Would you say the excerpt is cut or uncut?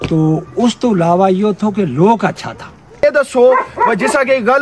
cut